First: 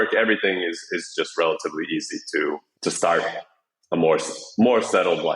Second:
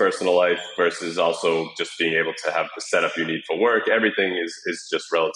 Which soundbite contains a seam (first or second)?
first